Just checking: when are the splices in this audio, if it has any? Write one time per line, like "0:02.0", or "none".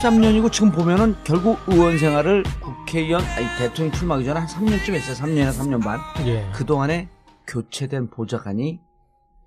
none